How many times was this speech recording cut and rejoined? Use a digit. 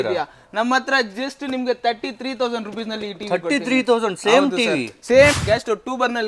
1